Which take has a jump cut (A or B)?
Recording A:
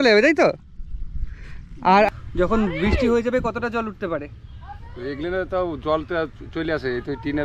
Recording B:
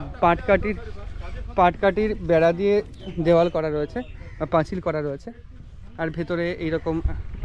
A